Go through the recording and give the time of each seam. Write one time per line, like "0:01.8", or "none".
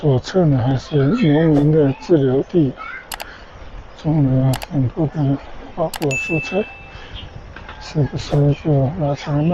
none